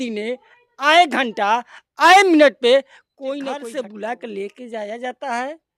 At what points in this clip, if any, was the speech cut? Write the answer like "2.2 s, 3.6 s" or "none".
3.7 s